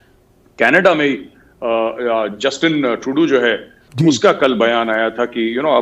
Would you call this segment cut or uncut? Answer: uncut